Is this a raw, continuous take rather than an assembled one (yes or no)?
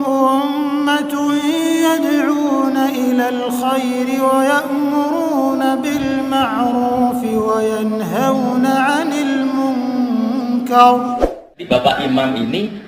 no